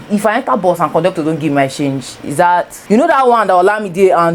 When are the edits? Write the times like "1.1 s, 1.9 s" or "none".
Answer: 2.8 s